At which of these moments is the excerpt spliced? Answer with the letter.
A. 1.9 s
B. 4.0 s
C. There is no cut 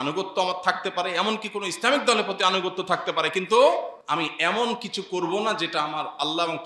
B